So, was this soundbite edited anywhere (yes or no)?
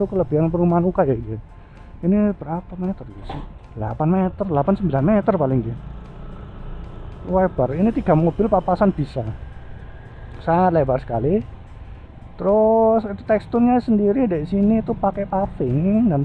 no